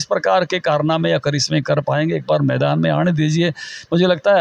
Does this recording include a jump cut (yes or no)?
no